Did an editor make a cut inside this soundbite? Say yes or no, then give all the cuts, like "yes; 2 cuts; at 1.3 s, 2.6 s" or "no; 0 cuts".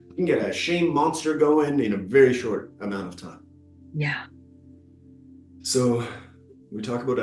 no; 0 cuts